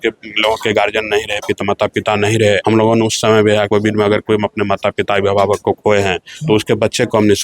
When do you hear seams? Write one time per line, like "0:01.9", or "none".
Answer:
0:02.6
0:03.7